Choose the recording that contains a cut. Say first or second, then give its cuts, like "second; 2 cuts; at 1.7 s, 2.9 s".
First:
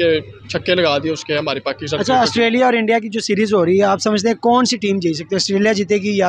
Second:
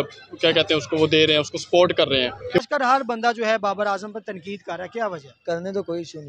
second; 1 cut; at 2.6 s